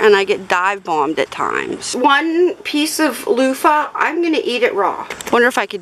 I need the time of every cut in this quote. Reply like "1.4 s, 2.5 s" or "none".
1.9 s, 5.0 s